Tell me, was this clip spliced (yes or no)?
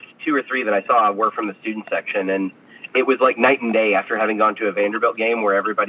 no